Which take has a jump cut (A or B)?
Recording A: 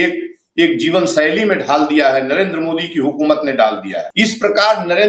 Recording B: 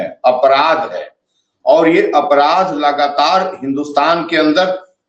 A